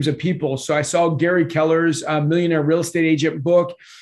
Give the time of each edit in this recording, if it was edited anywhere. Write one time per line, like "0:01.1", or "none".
none